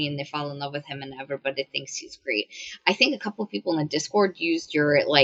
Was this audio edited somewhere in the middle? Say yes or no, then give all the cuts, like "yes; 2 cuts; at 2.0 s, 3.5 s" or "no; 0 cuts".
no; 0 cuts